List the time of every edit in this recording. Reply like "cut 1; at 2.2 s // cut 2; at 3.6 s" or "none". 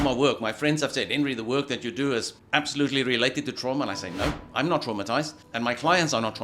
cut 1; at 2.4 s // cut 2; at 5.4 s